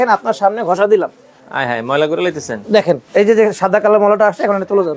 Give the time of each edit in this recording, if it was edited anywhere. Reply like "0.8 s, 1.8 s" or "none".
3.0 s

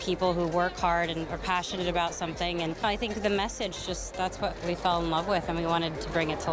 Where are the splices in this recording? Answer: 2.8 s

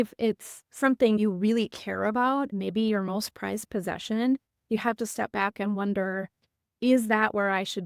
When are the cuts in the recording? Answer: 1.2 s, 2.5 s

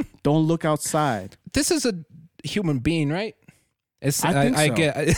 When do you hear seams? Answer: 1.4 s

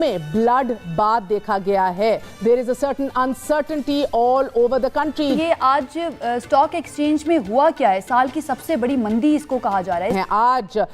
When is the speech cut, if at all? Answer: 2.3 s, 5.3 s, 10.1 s

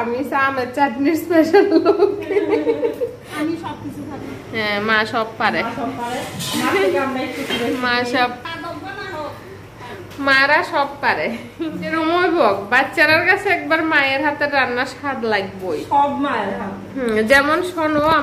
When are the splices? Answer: 3.3 s, 11.9 s

